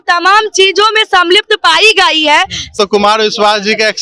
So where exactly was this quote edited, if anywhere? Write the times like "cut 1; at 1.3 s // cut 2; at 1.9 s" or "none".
cut 1; at 2.8 s